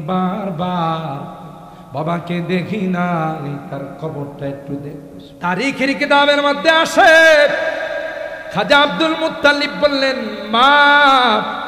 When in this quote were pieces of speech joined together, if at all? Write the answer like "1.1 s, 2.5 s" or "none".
5.2 s